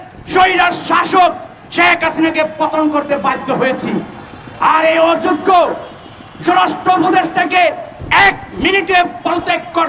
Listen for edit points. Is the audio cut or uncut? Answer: uncut